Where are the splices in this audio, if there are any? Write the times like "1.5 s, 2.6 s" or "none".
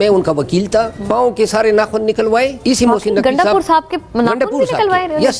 1.0 s, 2.6 s